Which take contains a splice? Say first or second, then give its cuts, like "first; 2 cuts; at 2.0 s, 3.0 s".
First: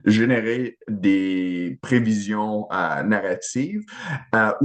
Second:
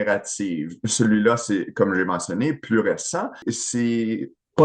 second; 1 cut; at 3.4 s